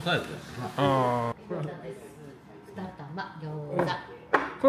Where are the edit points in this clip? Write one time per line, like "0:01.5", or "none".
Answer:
0:01.4